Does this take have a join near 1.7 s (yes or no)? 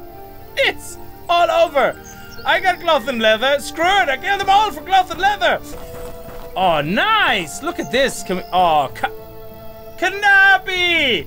no